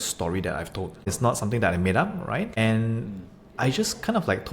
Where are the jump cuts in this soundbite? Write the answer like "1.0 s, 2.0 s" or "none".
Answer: 1.1 s, 2.5 s

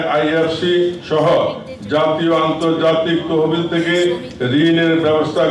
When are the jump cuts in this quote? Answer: none

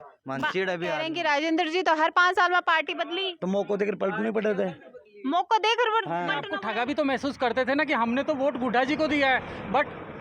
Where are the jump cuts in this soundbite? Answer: 1.1 s, 6.5 s

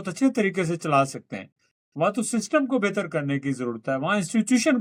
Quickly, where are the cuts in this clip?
none

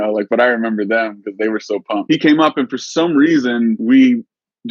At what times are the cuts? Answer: 2.0 s, 3.8 s

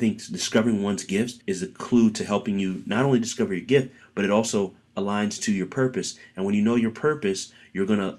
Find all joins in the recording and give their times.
1.4 s

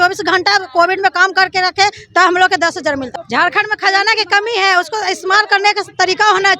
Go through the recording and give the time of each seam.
3.2 s

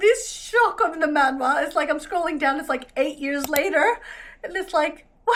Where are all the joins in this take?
none

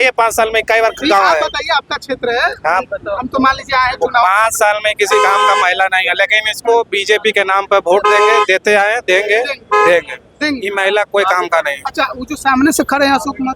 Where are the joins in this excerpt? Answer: none

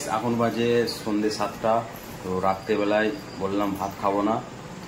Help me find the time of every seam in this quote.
none

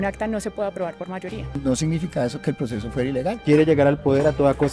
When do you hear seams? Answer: 1.6 s, 3.3 s

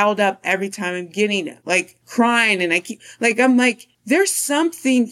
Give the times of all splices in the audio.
1.6 s

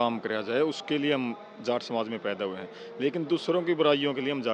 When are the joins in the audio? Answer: none

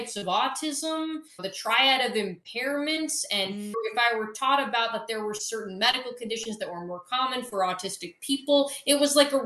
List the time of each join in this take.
1.3 s, 3.7 s

